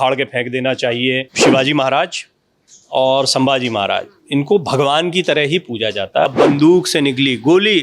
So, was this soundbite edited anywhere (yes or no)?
yes